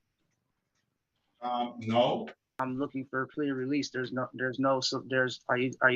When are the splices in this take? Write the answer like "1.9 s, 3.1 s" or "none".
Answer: 2.5 s